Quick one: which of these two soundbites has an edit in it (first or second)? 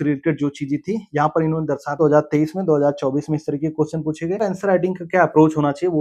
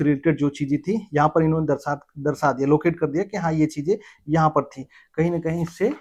first